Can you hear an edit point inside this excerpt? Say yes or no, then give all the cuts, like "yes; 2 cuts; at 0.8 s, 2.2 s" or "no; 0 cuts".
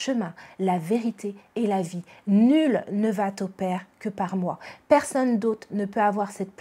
no; 0 cuts